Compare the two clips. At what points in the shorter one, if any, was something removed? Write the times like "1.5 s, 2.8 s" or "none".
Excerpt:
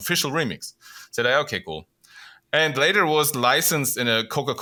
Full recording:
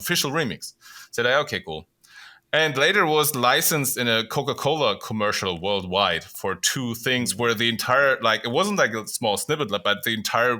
none